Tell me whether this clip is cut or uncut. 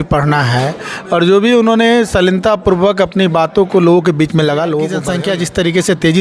cut